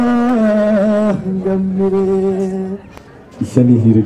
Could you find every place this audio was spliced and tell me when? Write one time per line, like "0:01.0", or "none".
0:02.8